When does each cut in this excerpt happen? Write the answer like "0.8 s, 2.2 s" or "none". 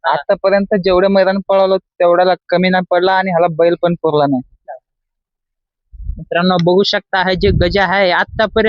4.6 s